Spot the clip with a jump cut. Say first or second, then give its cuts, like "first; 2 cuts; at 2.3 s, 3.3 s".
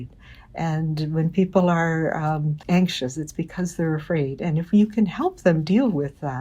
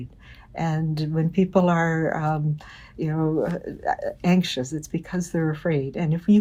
first; 1 cut; at 2.6 s